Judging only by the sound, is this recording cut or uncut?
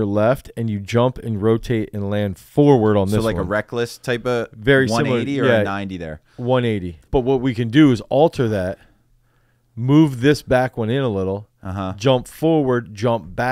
cut